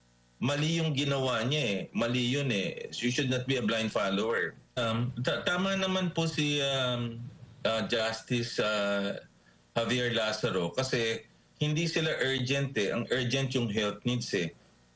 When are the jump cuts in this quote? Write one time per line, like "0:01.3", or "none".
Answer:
0:04.8